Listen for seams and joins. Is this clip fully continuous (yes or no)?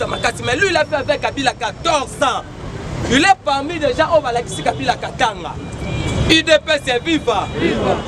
yes